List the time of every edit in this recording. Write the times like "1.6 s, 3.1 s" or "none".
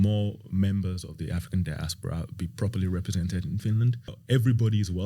4.2 s